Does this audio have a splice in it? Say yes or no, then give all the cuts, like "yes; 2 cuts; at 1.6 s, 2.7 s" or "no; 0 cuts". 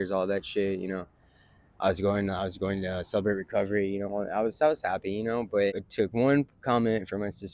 yes; 1 cut; at 5.8 s